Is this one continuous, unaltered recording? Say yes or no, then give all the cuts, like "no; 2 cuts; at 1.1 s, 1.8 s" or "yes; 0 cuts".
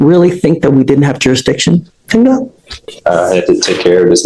yes; 0 cuts